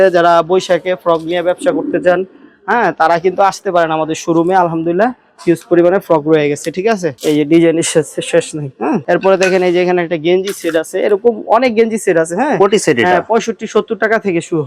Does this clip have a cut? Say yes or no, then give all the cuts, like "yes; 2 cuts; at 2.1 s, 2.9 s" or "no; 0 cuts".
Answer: no; 0 cuts